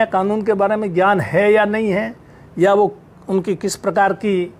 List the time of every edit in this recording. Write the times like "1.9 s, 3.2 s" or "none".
none